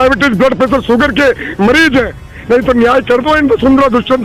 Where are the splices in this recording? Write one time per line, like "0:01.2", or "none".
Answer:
0:02.3